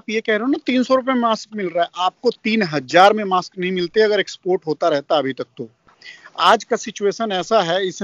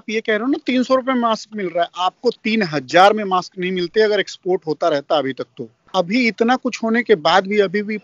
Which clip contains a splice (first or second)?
second